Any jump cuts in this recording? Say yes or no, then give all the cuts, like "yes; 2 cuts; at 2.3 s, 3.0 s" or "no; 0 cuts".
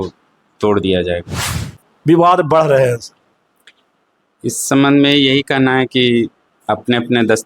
yes; 1 cut; at 1.9 s